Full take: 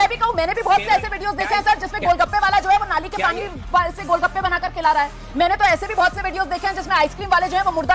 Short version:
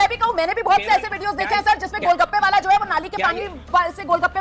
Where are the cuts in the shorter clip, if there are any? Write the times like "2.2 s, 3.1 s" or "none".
none